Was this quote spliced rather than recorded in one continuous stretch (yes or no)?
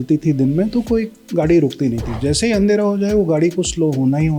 no